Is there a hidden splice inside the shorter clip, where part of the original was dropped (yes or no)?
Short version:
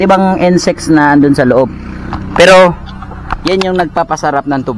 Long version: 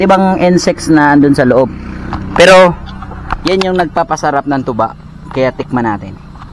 no